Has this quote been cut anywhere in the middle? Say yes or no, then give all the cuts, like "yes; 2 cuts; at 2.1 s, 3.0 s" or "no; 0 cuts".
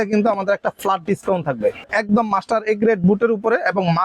yes; 1 cut; at 1.9 s